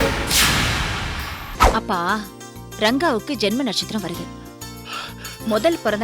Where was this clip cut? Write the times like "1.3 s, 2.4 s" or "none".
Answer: 1.5 s